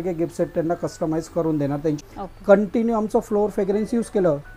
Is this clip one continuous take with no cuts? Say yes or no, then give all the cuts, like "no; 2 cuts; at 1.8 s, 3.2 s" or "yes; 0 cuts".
no; 1 cut; at 2.0 s